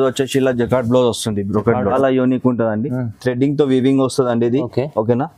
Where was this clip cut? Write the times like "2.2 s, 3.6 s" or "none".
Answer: 1.9 s